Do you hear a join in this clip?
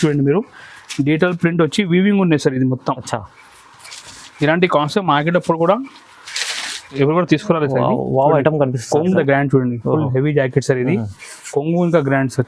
yes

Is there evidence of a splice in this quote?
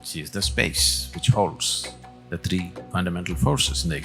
yes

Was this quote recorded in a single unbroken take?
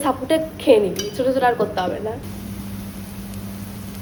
yes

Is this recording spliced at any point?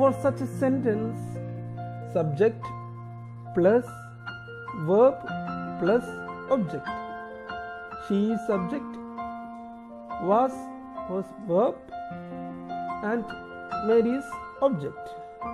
no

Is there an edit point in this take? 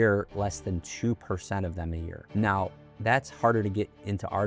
yes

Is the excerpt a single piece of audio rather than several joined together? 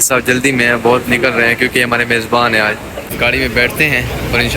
no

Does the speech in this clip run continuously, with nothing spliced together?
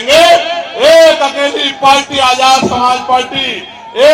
yes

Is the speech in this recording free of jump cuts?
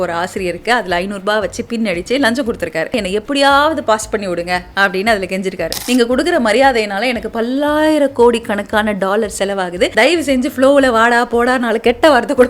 no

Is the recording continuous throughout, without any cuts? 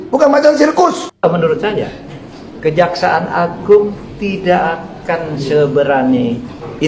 no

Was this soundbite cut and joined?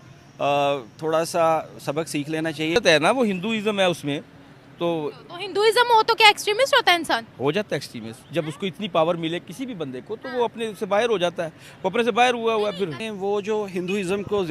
yes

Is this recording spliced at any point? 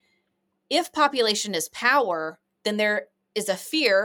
no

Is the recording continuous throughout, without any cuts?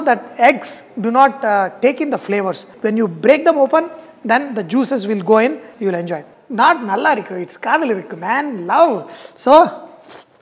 no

